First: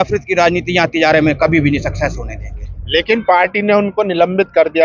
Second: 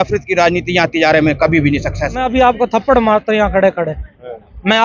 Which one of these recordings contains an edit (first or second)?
second